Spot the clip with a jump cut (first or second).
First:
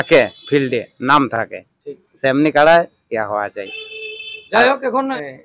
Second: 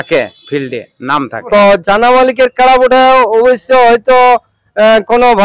second